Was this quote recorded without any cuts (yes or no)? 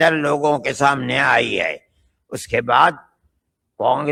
yes